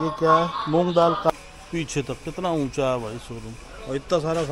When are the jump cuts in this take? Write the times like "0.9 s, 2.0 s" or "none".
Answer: 1.5 s